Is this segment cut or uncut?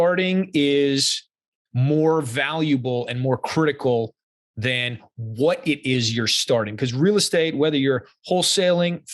uncut